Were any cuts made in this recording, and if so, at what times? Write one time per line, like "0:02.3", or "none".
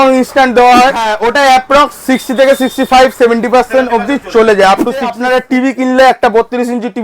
0:01.1
0:05.2